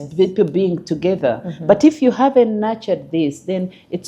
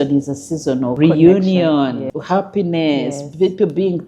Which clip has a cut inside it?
second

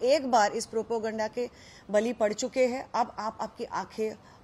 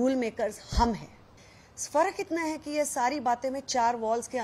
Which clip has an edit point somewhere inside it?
second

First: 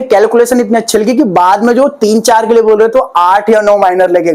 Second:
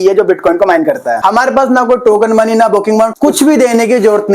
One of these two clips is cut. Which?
second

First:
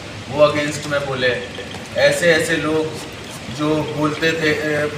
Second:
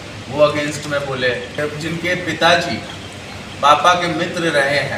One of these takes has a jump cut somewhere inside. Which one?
second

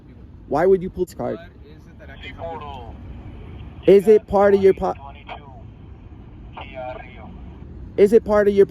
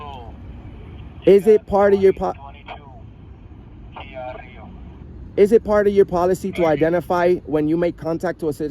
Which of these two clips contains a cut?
first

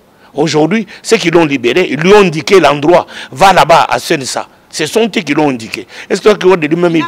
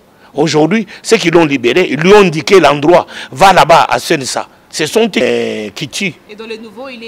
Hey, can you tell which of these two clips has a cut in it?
second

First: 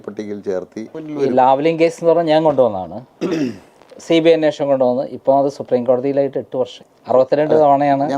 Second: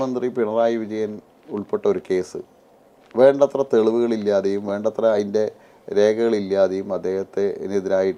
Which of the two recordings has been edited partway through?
first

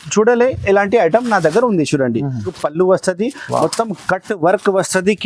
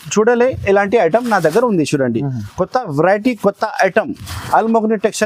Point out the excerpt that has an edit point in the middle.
first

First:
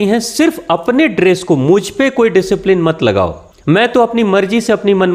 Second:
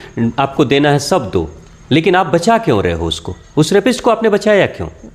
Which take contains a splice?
first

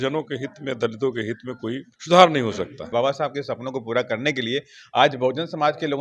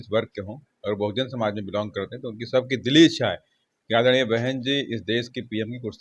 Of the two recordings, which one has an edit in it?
first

